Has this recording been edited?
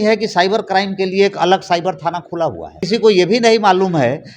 yes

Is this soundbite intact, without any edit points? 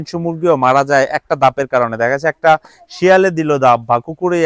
yes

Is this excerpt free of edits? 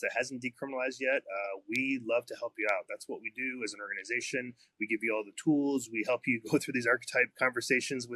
yes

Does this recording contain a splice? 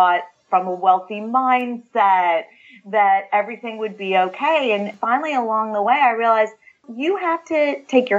yes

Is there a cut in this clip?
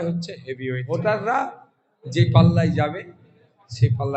yes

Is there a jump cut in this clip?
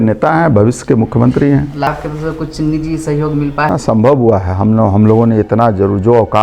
yes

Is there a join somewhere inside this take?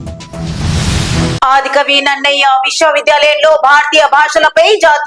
yes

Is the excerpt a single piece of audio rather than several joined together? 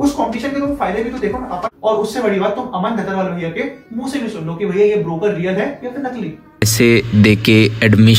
no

